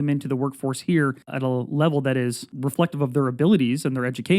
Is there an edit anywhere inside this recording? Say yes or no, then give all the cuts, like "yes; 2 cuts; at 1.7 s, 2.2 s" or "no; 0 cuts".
yes; 2 cuts; at 1.3 s, 2.5 s